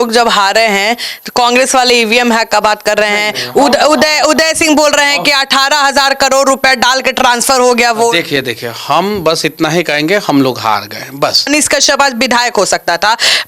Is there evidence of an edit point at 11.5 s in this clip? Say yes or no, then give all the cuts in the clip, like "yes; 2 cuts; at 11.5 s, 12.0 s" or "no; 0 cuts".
yes; 1 cut; at 11.5 s